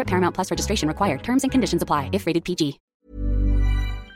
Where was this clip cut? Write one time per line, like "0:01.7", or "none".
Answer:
0:02.9